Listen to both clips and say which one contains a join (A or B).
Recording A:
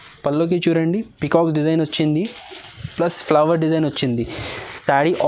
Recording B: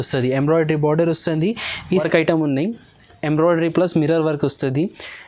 B